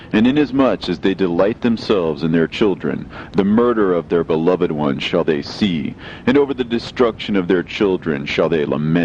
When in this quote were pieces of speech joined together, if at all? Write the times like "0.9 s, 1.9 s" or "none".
7.5 s